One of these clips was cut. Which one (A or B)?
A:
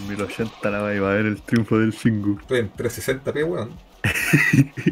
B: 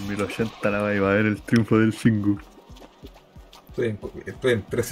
A